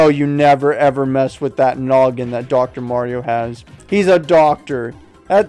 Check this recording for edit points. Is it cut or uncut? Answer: uncut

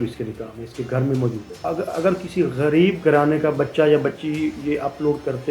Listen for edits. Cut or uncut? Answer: cut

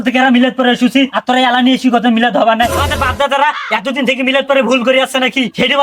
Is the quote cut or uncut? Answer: cut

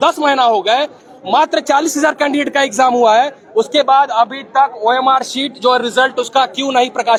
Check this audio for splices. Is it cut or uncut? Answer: uncut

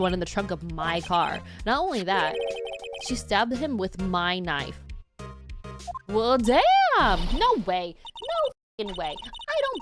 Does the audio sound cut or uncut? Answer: uncut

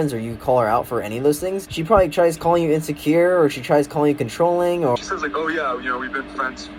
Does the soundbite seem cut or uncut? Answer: cut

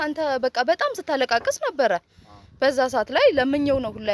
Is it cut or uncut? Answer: uncut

